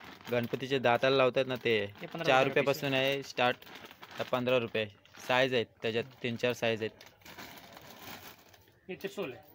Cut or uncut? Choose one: uncut